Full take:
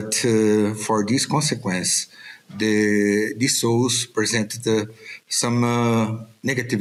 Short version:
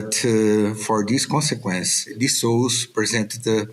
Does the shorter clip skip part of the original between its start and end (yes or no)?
yes